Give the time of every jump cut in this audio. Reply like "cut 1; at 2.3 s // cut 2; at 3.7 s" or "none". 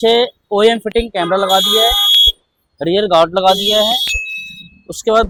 none